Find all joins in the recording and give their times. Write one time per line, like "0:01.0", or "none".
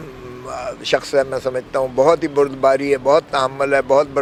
none